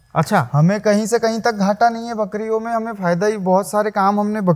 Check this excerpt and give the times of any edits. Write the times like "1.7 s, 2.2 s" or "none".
none